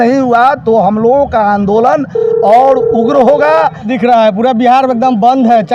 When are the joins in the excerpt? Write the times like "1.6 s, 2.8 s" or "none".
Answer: 3.9 s